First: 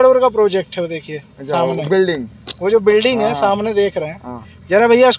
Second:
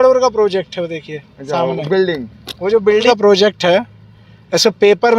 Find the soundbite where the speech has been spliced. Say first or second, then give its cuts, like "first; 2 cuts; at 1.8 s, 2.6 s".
second; 1 cut; at 3.0 s